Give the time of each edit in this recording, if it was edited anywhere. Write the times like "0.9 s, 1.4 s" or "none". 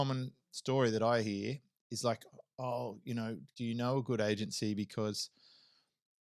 3.5 s